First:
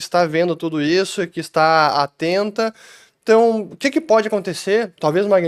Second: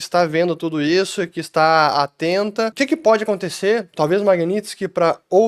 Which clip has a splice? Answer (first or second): second